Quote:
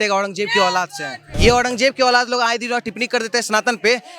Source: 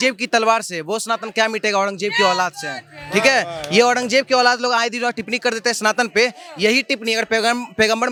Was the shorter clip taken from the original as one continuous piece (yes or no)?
no